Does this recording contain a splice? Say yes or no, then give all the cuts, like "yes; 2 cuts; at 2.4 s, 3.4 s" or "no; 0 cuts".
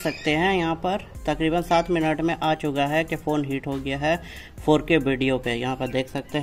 no; 0 cuts